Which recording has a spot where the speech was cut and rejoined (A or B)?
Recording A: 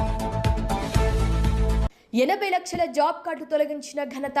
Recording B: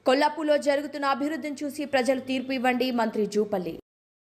A